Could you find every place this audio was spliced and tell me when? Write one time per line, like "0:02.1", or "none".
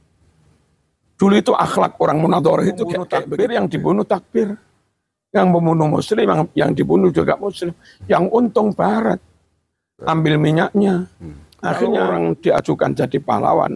0:03.2
0:11.9